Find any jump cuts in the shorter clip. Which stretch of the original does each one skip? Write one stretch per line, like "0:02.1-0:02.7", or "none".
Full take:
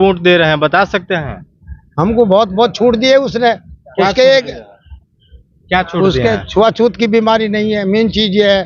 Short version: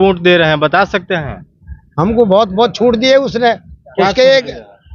none

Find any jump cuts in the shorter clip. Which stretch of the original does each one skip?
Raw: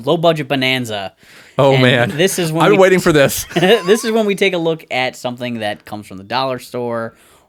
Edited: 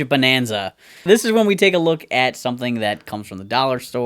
0:01.4-0:03.8

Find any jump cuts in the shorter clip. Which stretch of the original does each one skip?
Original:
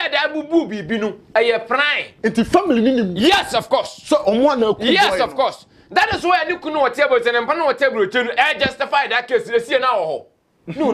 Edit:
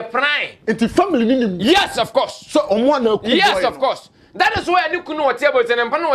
none

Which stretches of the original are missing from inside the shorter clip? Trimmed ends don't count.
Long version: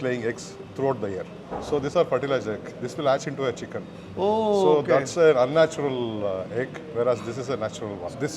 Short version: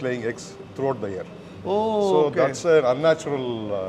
0:01.4-0:03.9

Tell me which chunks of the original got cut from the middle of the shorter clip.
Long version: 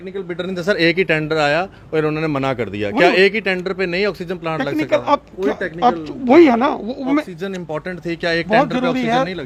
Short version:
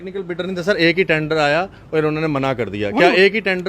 none

